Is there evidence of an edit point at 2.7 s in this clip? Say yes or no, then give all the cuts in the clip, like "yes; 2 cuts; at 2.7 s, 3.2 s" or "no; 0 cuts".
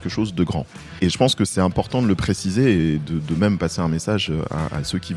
no; 1 cut; at 1.1 s